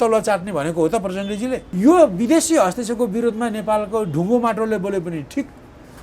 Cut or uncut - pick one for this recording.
cut